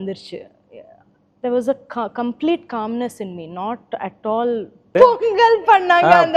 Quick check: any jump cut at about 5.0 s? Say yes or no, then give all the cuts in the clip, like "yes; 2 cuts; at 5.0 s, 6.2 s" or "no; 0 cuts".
yes; 1 cut; at 5.0 s